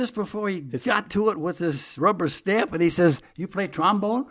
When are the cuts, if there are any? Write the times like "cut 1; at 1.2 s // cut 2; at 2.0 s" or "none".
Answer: none